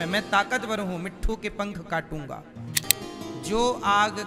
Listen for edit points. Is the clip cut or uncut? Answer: cut